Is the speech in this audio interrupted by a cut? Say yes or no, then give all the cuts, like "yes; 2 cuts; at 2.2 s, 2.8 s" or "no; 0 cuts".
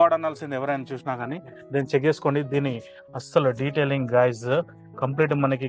no; 0 cuts